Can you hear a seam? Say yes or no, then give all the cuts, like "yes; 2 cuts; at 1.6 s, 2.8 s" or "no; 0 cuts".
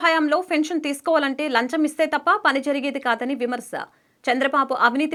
no; 0 cuts